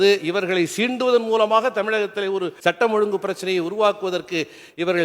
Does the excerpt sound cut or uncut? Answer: cut